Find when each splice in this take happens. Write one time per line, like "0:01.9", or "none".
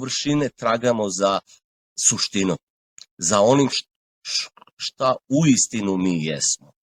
none

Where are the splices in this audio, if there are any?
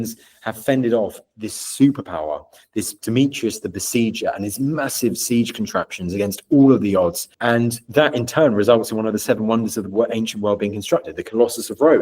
0:07.3

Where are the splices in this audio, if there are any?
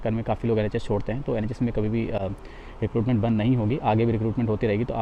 none

